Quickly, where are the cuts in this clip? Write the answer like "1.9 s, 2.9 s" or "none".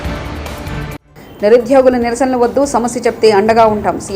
1.0 s